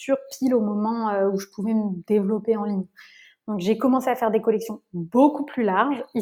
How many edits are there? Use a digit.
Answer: 0